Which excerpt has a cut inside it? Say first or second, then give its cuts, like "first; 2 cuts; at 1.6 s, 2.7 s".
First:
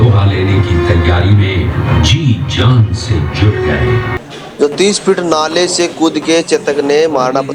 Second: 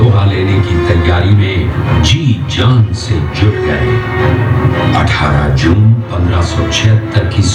first; 1 cut; at 4.1 s